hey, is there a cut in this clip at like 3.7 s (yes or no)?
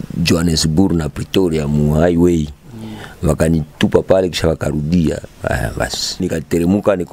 yes